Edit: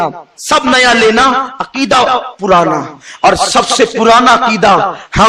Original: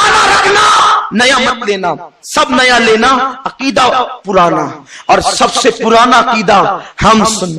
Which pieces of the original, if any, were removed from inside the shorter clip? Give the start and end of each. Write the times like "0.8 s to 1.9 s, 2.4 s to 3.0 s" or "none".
none

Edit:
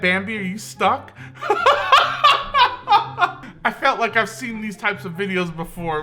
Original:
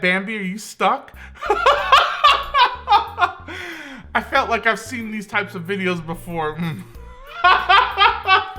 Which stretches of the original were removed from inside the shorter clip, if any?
3.5 s to 4.0 s

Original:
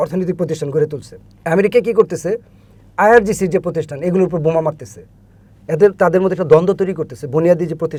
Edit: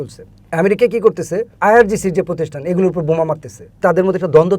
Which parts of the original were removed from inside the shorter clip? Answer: 2.4 s to 2.8 s, 5.1 s to 5.9 s

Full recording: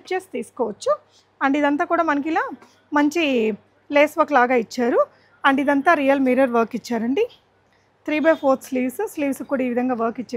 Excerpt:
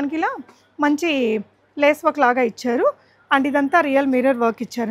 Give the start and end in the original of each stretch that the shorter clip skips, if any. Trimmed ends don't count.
none

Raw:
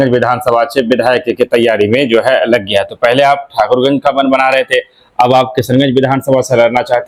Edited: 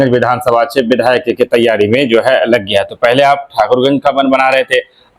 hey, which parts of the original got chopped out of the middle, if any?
none

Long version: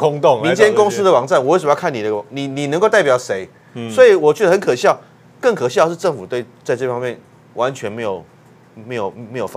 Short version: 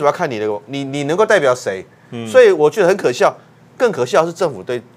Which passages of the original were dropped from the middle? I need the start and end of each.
none

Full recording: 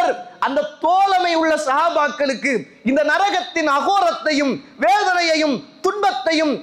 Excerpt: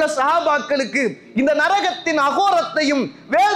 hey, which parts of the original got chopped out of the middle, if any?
none

